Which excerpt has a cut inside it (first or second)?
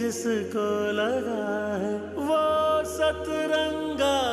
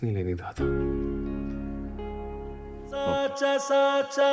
second